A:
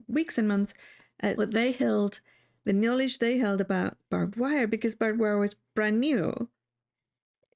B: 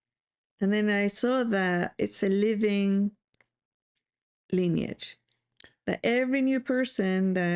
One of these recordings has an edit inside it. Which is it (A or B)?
A